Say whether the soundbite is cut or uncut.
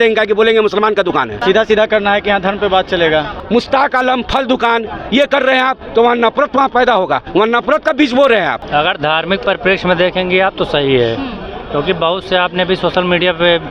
cut